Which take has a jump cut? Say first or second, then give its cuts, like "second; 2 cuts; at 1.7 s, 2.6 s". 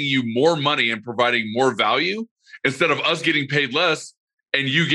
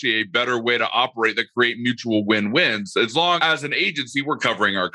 second; 1 cut; at 3.4 s